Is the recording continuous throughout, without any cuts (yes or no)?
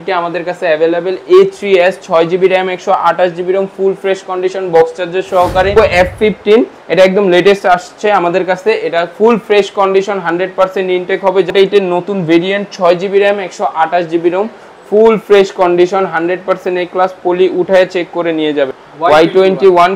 no